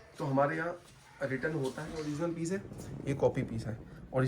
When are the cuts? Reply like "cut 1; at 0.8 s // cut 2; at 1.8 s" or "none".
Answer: cut 1; at 2.0 s